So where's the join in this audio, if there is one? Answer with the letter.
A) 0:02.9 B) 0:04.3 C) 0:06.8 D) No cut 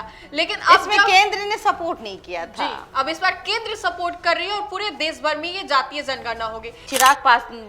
C